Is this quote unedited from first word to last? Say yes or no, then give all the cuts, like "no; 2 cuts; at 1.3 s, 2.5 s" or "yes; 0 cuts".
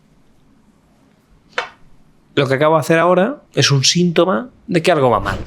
no; 2 cuts; at 3.4 s, 4.6 s